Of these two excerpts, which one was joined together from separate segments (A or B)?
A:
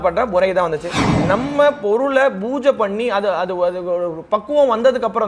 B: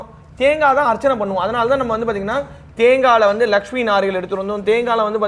A